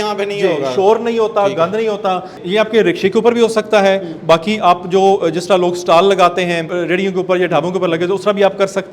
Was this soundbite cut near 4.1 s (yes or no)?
no